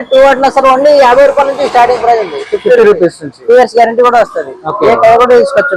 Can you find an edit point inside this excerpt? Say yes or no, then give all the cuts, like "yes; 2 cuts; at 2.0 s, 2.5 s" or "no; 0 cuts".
no; 0 cuts